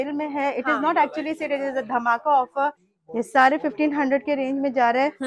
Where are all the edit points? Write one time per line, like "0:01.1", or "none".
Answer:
0:02.8

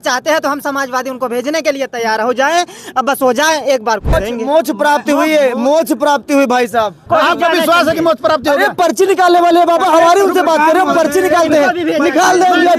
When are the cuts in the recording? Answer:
0:04.1
0:07.0

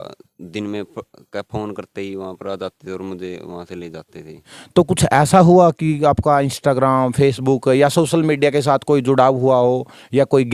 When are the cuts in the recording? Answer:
0:04.5

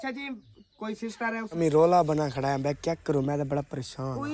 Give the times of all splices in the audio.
0:01.6

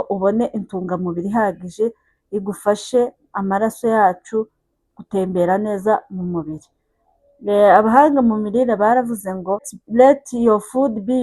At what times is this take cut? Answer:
0:09.8

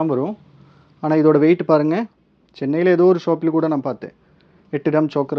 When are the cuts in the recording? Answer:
0:02.2

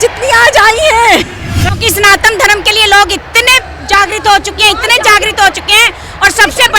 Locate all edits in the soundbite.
0:01.7

